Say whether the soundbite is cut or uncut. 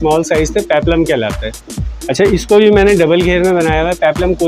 uncut